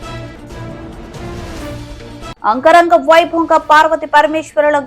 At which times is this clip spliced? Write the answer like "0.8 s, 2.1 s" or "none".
1.8 s